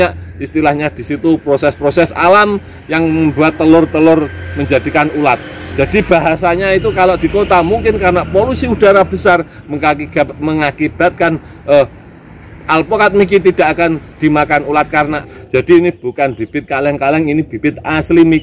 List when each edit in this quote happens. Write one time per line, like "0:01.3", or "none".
0:15.2